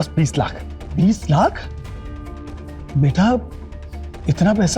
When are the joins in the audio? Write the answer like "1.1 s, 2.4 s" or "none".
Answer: 0.9 s